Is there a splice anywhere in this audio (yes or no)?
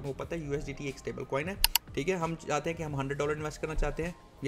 yes